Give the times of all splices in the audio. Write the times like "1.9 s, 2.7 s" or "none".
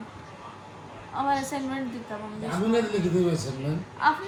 none